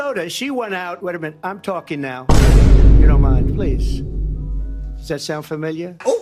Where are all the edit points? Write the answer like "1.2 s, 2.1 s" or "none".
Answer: none

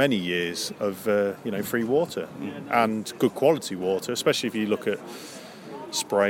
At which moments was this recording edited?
none

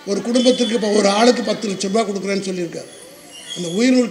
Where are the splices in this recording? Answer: none

